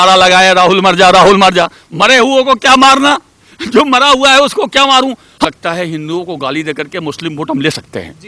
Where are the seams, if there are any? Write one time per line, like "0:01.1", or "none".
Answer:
0:05.4